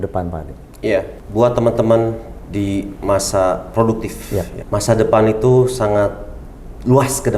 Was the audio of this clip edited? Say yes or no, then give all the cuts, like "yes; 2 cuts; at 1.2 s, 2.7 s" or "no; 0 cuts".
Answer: yes; 2 cuts; at 1.2 s, 4.6 s